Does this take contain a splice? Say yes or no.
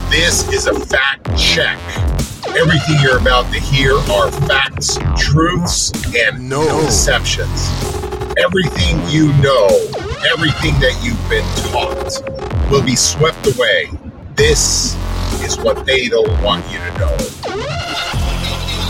no